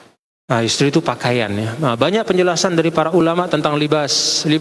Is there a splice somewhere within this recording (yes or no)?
no